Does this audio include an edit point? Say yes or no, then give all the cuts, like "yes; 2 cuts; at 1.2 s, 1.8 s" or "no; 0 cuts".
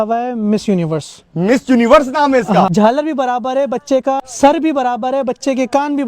yes; 2 cuts; at 2.7 s, 4.3 s